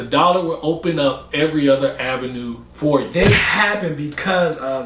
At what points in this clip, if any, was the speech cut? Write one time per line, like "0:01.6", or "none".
0:03.2